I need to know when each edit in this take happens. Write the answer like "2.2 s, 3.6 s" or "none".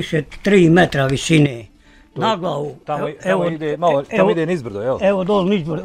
none